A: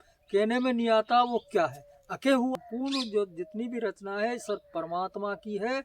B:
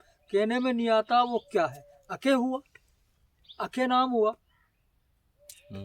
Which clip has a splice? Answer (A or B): A